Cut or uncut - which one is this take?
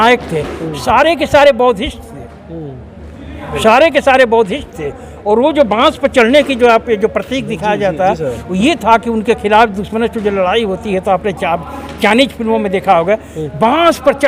uncut